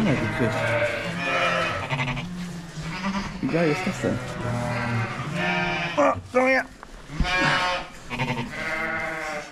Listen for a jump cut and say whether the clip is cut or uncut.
uncut